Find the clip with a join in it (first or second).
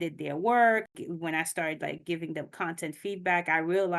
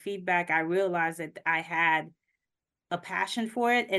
first